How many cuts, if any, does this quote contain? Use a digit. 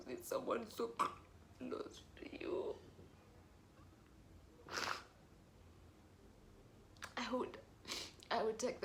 0